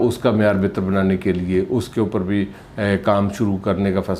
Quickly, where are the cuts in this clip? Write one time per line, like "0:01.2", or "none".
none